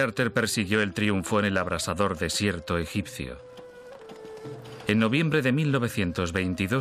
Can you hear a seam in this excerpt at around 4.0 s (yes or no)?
no